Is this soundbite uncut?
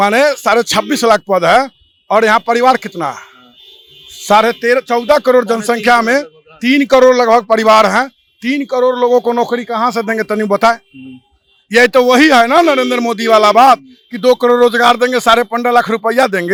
yes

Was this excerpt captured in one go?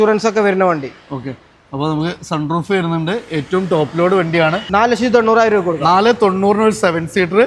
no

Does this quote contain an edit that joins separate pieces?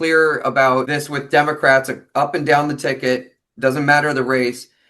yes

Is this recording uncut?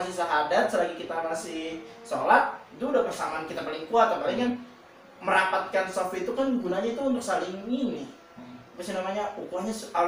yes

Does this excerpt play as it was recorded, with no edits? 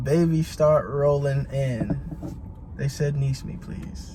yes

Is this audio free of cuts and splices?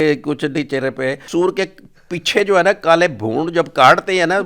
no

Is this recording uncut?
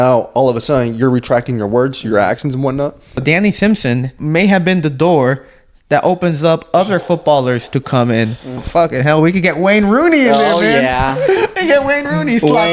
no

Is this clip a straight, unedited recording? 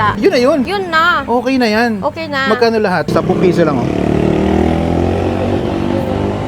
no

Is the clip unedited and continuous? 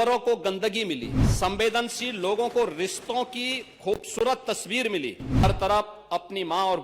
no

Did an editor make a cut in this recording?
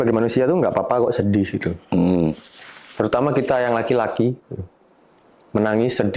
no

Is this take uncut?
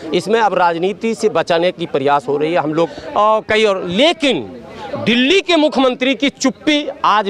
no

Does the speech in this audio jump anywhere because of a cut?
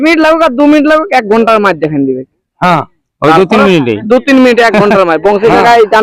no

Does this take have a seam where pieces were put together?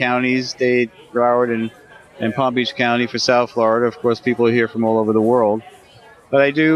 yes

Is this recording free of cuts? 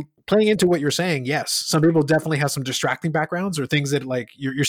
yes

